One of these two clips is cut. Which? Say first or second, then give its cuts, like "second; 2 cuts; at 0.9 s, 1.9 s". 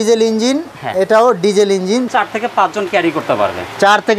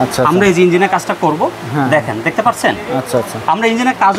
first; 1 cut; at 2.1 s